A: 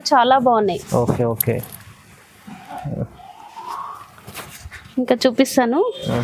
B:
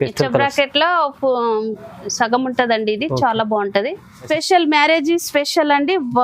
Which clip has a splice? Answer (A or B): B